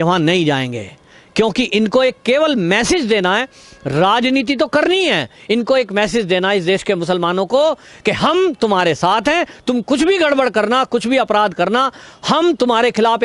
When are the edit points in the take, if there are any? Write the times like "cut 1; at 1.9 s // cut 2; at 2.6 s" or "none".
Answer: none